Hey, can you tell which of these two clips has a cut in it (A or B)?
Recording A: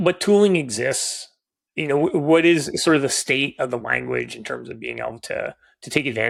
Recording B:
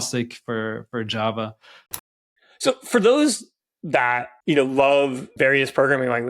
B